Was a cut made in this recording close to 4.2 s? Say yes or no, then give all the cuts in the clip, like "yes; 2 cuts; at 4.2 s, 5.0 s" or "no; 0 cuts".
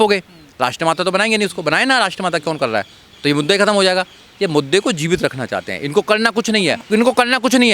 no; 1 cut; at 6.8 s